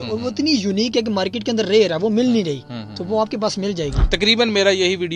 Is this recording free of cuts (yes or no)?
no